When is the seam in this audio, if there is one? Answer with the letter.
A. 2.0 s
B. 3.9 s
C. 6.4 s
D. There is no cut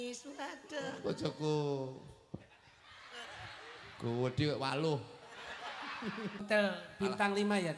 C